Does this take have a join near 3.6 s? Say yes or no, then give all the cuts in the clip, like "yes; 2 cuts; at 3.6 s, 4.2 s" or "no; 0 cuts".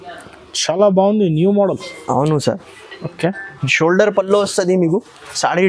yes; 1 cut; at 3.6 s